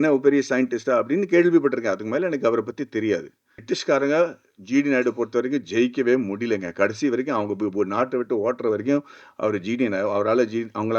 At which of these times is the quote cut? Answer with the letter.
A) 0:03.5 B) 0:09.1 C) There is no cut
A